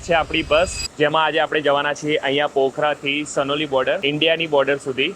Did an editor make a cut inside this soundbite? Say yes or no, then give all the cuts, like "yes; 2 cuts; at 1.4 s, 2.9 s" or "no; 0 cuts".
yes; 1 cut; at 4.0 s